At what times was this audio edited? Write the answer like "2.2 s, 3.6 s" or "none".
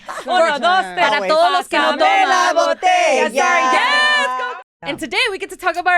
4.4 s